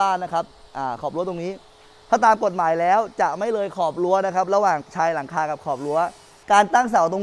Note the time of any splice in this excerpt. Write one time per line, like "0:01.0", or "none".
0:06.3